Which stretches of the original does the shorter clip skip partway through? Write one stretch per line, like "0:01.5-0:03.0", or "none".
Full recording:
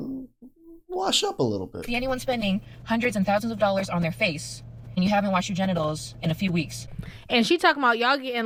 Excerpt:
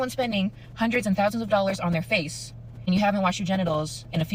none